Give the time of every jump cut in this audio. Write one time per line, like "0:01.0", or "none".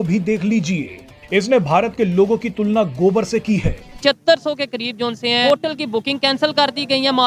0:03.9
0:05.4